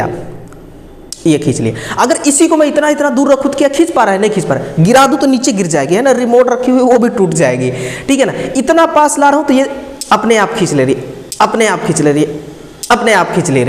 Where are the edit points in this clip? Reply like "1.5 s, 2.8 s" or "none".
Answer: none